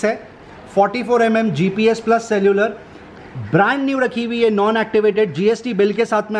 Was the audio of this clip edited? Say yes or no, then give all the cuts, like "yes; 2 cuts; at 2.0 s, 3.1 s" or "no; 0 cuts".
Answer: no; 0 cuts